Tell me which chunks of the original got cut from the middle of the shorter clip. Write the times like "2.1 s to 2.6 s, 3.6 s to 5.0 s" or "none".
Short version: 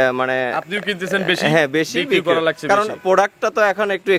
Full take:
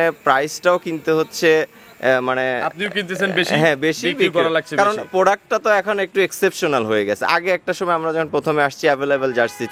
none